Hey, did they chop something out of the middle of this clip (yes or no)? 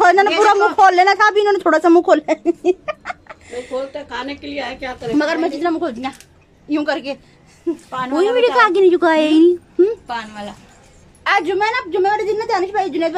yes